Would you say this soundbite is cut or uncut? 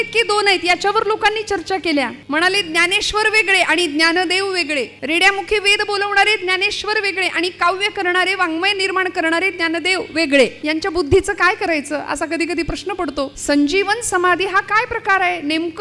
cut